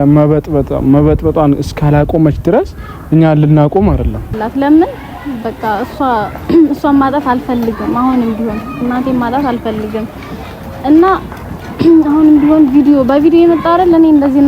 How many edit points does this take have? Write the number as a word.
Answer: one